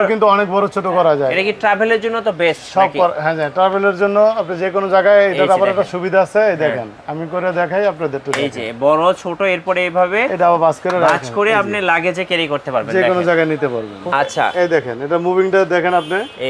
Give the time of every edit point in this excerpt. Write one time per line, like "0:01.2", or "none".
0:14.1